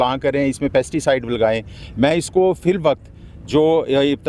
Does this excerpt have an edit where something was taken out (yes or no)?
no